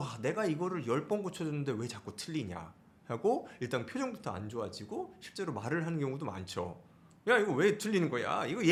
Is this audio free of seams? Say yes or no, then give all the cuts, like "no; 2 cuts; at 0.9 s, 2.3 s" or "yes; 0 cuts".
yes; 0 cuts